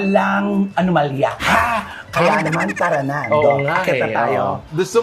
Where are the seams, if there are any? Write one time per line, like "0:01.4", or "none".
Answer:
none